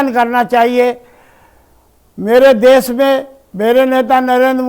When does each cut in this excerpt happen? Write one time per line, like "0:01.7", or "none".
none